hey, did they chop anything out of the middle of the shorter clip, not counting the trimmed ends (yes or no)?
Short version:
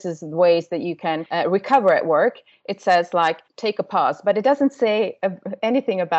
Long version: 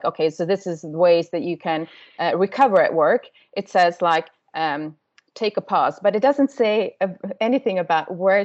yes